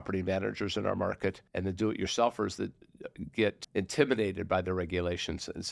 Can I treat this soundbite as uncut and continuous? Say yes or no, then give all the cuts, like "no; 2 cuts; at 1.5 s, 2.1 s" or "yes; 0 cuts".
no; 2 cuts; at 1.5 s, 3.6 s